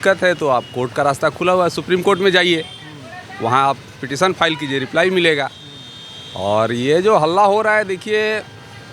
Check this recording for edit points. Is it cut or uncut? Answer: uncut